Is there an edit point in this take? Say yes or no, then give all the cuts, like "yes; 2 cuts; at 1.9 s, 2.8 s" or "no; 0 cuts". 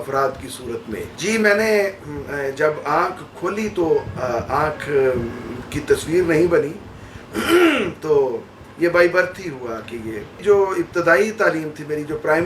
no; 0 cuts